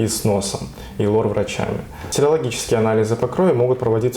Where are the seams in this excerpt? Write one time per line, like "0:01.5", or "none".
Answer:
0:02.0